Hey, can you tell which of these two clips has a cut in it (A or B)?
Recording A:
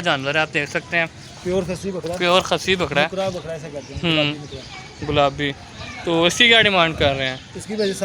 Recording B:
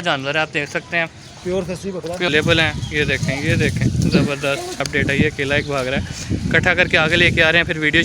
B